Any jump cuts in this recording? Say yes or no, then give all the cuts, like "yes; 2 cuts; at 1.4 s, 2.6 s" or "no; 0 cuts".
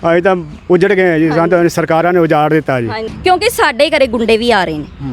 yes; 1 cut; at 3.1 s